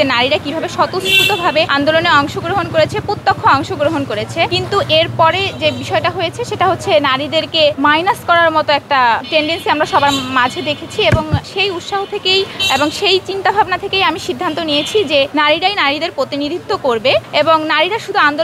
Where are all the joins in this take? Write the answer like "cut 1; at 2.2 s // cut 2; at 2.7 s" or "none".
cut 1; at 1.7 s // cut 2; at 4.5 s // cut 3; at 7.8 s // cut 4; at 9.2 s // cut 5; at 11.5 s // cut 6; at 12.6 s // cut 7; at 15.3 s // cut 8; at 17.3 s